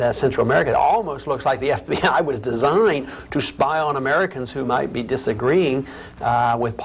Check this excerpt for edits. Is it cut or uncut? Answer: uncut